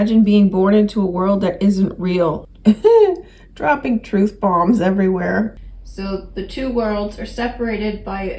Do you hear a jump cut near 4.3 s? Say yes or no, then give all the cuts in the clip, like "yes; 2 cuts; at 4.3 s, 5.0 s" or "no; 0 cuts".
no; 2 cuts; at 2.5 s, 5.6 s